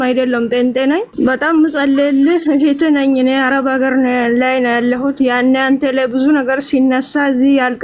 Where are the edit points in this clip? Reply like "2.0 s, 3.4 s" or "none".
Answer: 1.1 s